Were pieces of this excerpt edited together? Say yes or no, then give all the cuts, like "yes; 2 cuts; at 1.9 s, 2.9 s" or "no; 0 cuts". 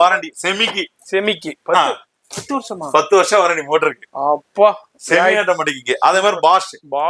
no; 0 cuts